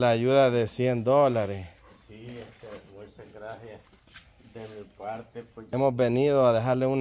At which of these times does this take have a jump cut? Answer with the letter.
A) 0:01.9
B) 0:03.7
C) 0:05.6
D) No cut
C